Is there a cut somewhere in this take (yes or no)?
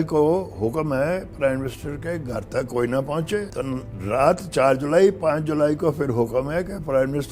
yes